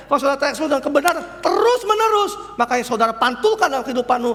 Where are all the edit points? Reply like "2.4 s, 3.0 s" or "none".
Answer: none